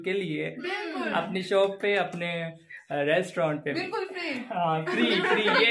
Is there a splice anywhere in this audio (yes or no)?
no